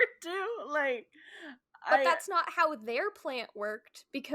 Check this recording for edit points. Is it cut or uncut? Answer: cut